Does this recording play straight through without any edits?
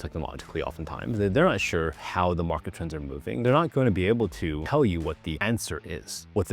no; 3 cuts; at 3.4 s, 4.6 s, 5.4 s

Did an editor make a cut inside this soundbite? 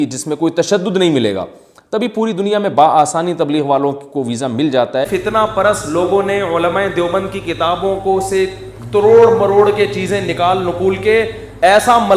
yes; 1 cut; at 5.1 s

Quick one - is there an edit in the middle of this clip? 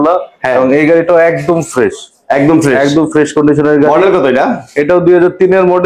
no; 0 cuts

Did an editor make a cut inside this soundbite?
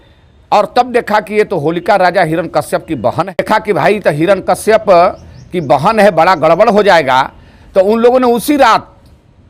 yes; 1 cut; at 3.4 s

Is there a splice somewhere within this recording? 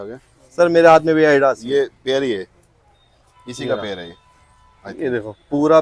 no; 0 cuts

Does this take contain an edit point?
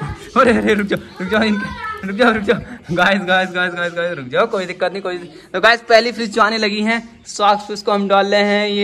no; 0 cuts

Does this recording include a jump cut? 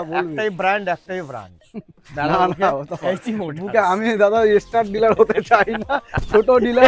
no; 0 cuts

